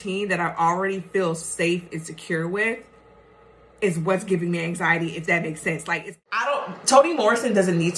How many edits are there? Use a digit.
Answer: 1